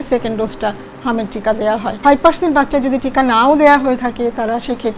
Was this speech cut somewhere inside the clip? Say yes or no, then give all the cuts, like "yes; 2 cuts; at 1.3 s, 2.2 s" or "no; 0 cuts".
yes; 1 cut; at 1.9 s